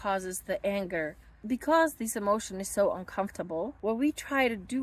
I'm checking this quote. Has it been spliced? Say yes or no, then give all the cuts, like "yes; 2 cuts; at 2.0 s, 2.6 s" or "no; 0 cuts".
yes; 2 cuts; at 1.3 s, 3.8 s